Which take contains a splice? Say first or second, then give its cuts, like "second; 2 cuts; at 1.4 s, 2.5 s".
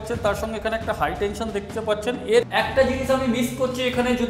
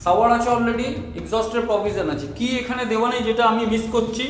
first; 1 cut; at 2.5 s